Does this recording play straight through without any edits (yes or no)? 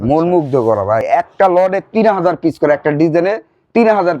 no